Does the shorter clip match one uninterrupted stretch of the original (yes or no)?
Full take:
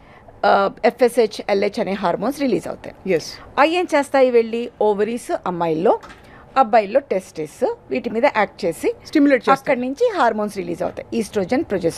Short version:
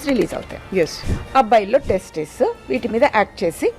no